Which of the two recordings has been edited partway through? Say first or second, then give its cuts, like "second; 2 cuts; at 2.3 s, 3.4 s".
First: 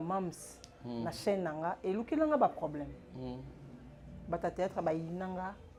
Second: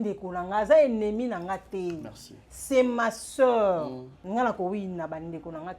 second; 1 cut; at 4.1 s